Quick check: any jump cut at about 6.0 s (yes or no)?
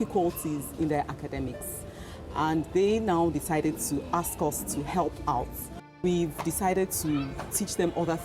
yes